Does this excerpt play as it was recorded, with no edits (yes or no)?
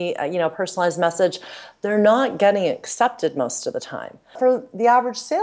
no